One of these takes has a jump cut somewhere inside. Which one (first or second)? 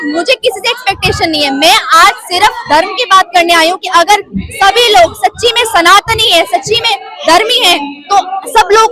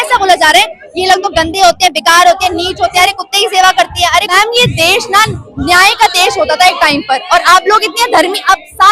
second